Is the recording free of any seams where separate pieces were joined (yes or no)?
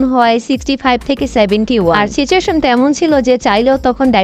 yes